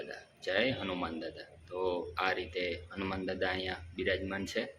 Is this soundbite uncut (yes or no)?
yes